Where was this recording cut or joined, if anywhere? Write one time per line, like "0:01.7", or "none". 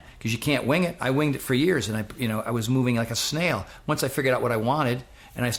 none